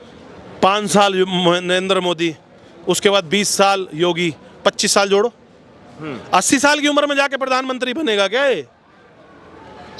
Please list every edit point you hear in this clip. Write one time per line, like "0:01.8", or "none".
none